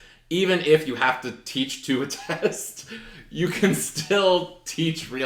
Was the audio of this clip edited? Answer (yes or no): no